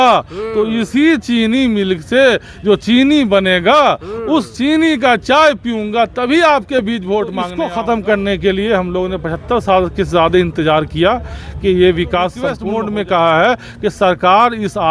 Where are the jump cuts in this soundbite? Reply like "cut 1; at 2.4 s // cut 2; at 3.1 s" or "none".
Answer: cut 1; at 7.6 s // cut 2; at 12.6 s

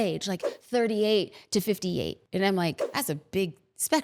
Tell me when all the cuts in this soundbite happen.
cut 1; at 2.2 s // cut 2; at 2.8 s

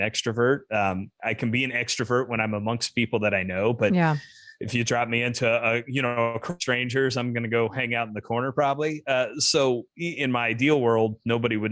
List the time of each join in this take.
cut 1; at 1.1 s

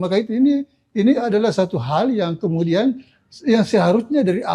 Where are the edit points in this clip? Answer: none

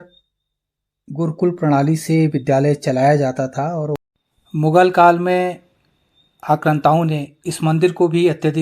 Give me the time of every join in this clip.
cut 1; at 3.9 s

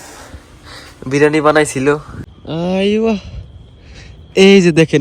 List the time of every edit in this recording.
cut 1; at 2.3 s

